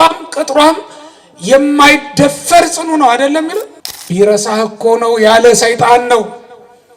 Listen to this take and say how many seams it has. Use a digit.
1